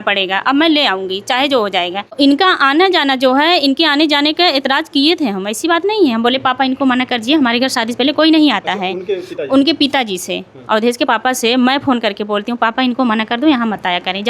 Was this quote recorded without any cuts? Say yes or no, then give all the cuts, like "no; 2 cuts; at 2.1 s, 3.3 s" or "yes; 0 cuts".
no; 1 cut; at 2.2 s